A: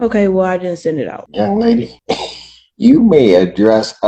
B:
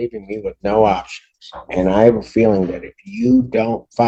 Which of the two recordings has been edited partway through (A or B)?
A